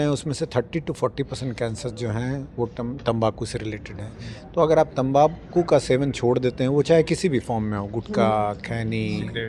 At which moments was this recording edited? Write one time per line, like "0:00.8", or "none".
none